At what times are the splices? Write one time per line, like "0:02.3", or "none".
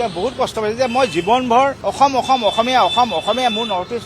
0:01.8